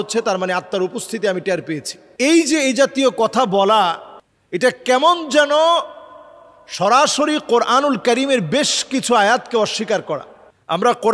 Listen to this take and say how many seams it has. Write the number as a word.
zero